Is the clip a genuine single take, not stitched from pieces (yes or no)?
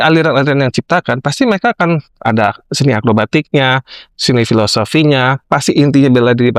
yes